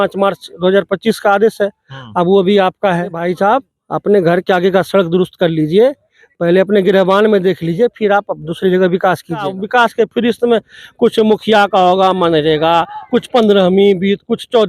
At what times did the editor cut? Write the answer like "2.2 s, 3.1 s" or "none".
3.2 s, 9.5 s